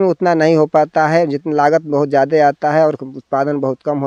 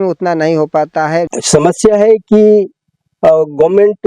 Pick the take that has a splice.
second; 1 cut; at 1.4 s

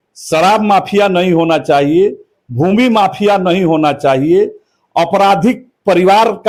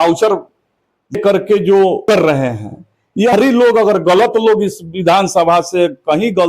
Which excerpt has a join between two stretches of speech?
second; 3 cuts; at 1.2 s, 2.0 s, 3.3 s

